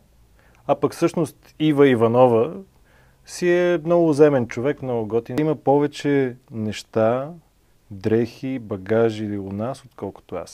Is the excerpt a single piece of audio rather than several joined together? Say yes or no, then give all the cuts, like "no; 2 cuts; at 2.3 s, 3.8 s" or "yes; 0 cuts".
no; 1 cut; at 5.4 s